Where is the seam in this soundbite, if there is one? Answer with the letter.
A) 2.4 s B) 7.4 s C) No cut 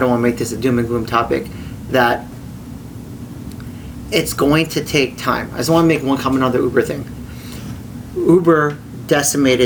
C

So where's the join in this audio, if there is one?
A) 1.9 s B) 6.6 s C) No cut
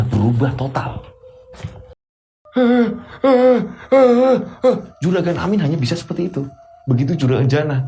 A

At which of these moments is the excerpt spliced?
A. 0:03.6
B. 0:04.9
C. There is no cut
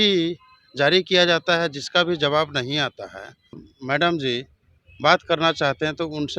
A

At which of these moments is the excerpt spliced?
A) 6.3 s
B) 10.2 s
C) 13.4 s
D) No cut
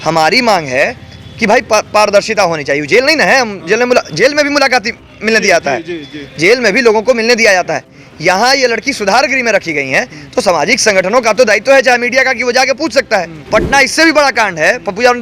C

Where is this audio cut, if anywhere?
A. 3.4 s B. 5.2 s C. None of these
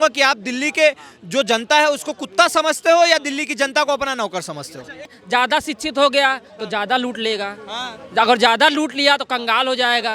B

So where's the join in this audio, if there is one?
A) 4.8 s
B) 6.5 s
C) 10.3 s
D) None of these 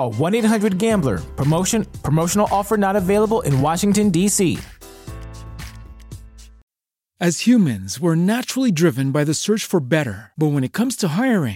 B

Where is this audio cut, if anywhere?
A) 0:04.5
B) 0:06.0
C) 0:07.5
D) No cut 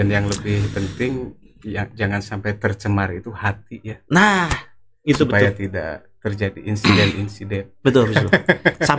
D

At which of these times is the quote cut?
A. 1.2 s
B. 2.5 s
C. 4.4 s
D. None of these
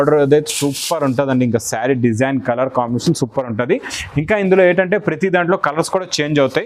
D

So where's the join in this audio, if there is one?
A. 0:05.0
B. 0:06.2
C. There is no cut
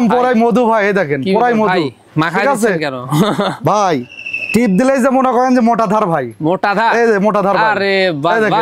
C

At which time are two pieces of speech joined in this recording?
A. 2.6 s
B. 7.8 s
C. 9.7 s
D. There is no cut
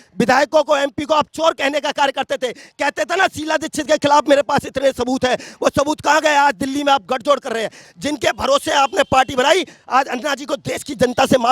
B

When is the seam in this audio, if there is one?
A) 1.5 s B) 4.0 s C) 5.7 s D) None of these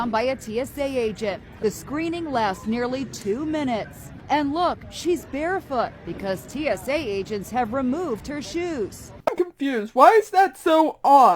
A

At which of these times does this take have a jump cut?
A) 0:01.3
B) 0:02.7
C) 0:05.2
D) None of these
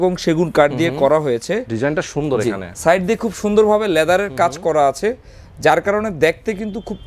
B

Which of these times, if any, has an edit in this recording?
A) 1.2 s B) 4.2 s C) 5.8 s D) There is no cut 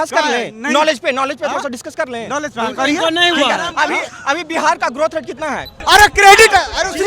C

